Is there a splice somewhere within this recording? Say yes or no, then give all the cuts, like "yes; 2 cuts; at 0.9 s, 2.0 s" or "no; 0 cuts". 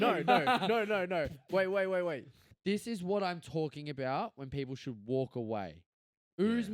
yes; 1 cut; at 2.5 s